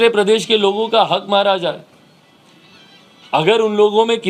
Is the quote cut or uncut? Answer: uncut